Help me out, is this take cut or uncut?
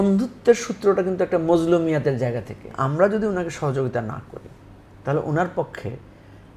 cut